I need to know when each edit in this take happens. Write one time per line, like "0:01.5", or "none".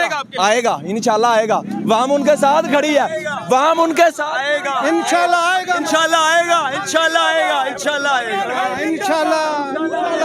none